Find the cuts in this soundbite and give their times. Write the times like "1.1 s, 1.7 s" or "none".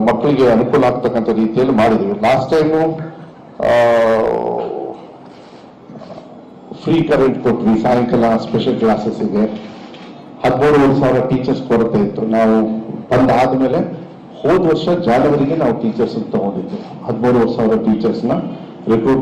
1.0 s